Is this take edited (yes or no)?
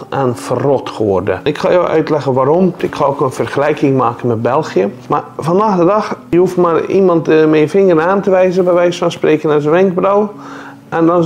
yes